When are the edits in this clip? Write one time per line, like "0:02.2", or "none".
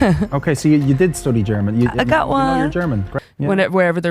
0:03.1